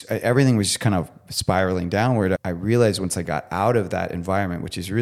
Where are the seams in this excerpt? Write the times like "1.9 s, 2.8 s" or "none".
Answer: 2.4 s